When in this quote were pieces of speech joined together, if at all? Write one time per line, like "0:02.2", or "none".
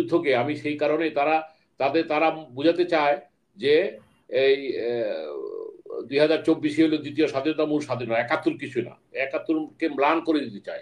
none

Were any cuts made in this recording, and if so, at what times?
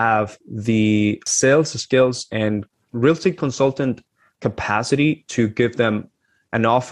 0:01.3
0:02.7

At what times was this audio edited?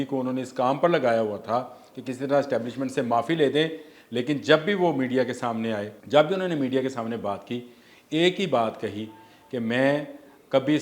0:05.9

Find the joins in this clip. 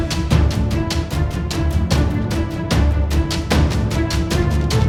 none

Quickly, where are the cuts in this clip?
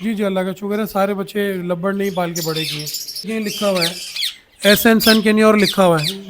0:03.3

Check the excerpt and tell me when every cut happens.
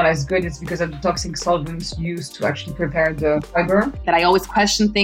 0:03.6

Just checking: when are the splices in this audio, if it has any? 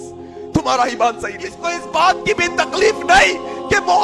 0:01.7

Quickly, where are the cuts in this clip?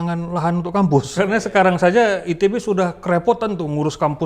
0:01.1

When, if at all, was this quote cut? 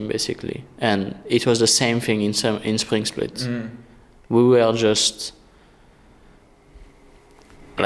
none

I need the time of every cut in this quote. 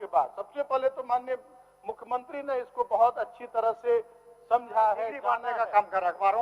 0:05.4

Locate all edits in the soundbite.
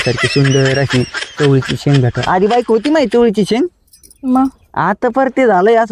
none

